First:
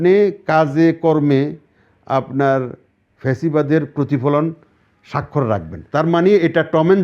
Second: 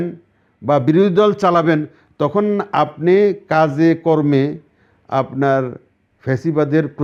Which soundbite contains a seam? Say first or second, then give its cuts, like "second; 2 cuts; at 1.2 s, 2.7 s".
first; 1 cut; at 5.8 s